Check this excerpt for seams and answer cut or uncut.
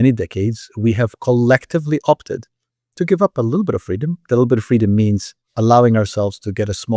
uncut